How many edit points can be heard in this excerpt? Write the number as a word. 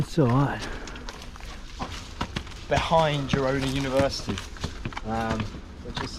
one